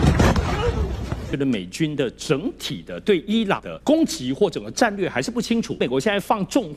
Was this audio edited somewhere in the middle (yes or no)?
yes